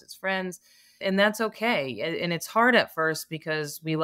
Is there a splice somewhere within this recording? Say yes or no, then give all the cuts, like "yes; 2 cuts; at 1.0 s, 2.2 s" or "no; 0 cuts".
yes; 1 cut; at 1.0 s